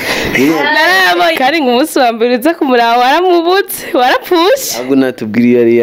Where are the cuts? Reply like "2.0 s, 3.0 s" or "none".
1.3 s